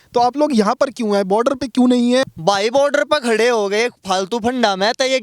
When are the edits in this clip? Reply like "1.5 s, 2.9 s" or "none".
2.2 s